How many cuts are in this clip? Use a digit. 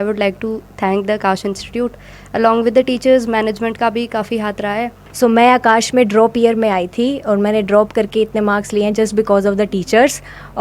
1